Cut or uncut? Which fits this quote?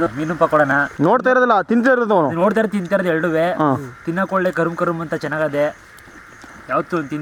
uncut